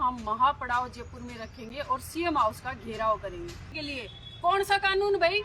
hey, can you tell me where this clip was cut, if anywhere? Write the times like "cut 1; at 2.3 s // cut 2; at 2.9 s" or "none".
cut 1; at 3.7 s